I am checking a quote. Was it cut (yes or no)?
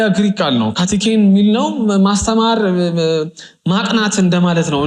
no